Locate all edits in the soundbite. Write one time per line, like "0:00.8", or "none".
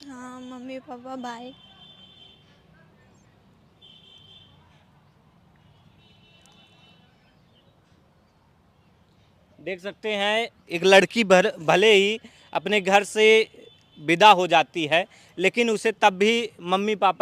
none